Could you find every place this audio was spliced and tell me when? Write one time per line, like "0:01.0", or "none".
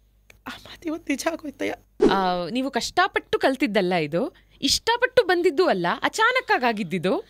0:01.9